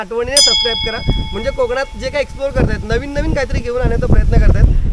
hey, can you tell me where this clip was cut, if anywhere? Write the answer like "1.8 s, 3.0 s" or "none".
none